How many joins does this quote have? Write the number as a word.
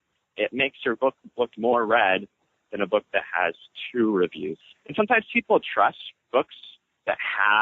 two